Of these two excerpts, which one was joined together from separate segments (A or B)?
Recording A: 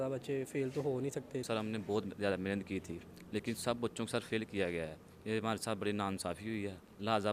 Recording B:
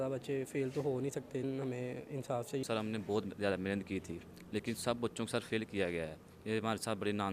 B